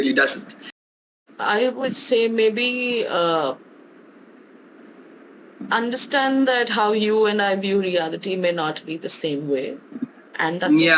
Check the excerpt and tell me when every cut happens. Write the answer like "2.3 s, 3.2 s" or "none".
0.9 s